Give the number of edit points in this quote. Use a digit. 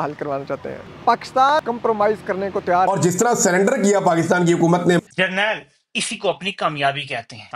3